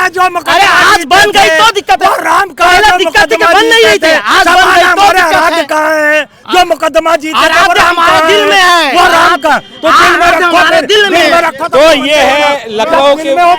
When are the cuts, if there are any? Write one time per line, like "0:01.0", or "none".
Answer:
none